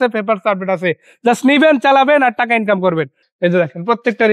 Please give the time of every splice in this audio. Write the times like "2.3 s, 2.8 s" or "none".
3.2 s